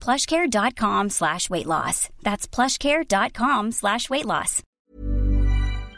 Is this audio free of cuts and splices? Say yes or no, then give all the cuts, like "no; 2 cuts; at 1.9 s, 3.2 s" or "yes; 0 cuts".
no; 1 cut; at 4.8 s